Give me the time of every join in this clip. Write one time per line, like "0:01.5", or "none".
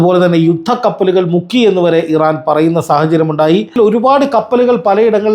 0:03.8